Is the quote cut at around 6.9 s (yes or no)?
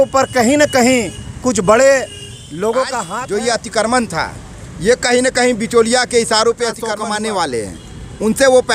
yes